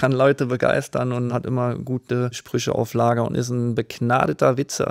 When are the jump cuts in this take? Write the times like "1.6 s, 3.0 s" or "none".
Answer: 1.3 s, 2.4 s